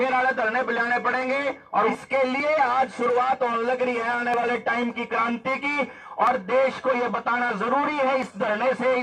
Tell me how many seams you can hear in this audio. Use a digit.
1